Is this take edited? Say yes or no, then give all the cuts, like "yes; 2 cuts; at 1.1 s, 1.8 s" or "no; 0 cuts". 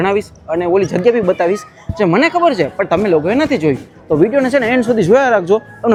no; 0 cuts